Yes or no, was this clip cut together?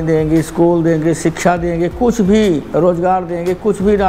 no